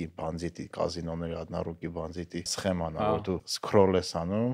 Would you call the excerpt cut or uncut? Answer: cut